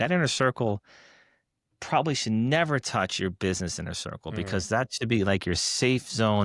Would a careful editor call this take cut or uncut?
uncut